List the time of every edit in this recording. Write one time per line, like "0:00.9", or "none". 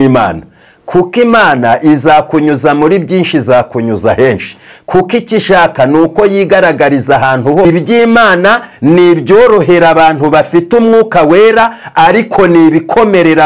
0:07.7